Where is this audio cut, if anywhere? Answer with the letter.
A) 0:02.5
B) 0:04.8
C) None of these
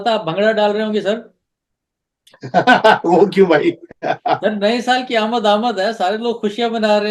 C